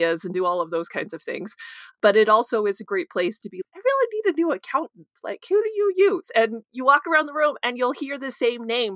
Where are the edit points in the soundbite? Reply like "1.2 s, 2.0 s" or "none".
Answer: 3.6 s